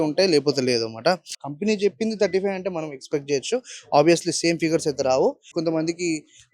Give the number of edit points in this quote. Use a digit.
2